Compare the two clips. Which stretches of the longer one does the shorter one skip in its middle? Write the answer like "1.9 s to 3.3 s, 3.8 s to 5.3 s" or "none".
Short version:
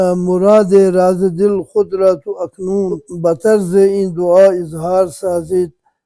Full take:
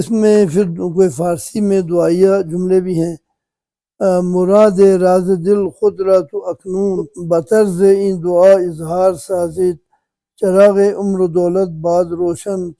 none